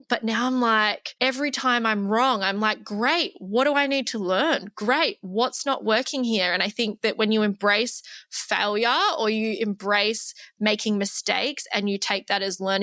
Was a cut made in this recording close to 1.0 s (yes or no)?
yes